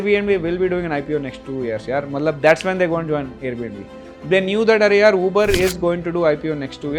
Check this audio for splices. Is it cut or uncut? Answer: uncut